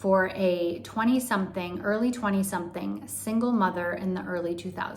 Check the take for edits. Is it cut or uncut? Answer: uncut